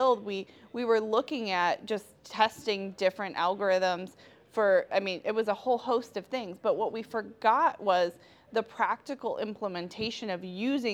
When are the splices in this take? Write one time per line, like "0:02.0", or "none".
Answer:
none